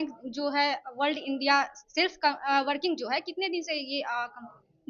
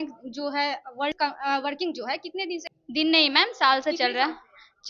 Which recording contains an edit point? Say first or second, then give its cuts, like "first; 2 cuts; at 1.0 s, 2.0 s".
second; 2 cuts; at 1.2 s, 2.7 s